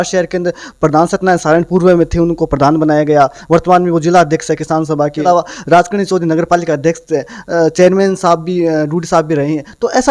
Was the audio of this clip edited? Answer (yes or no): yes